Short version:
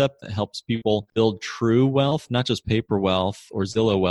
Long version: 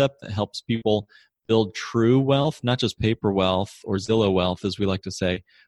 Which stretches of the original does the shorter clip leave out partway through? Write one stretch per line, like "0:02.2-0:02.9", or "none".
0:01.1-0:01.4